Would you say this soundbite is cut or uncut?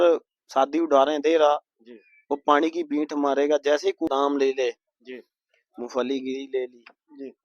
cut